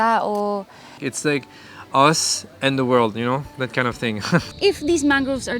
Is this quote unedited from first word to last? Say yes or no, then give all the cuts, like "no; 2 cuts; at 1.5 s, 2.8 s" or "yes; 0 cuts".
no; 2 cuts; at 1.0 s, 4.5 s